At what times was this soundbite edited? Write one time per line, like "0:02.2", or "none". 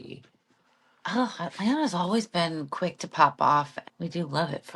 0:03.8